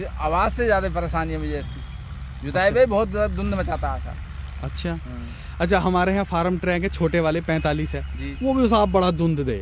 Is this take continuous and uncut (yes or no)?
yes